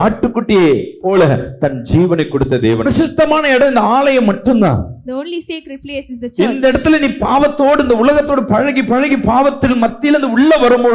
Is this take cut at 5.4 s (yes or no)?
no